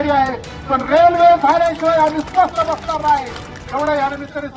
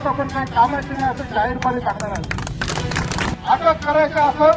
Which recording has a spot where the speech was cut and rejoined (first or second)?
second